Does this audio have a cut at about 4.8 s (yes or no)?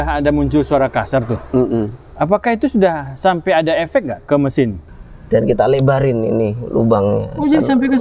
yes